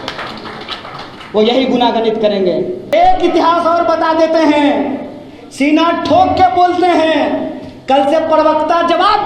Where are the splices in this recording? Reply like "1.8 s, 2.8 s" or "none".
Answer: 2.8 s